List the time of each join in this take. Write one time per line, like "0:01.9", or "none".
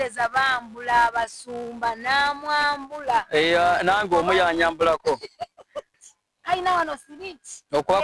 0:05.9